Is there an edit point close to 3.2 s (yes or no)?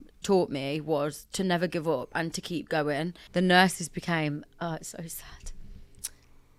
yes